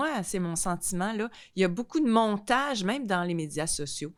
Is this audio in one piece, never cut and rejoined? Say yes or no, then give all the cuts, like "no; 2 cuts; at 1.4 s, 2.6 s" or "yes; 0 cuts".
yes; 0 cuts